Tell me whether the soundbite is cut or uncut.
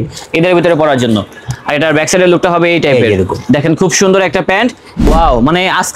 cut